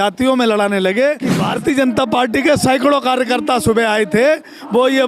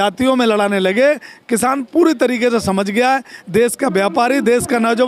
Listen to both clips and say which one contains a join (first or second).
first